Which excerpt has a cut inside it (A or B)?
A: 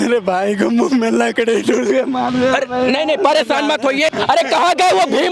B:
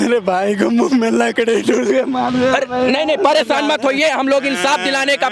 A